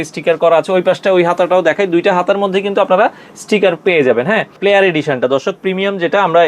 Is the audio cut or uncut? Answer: cut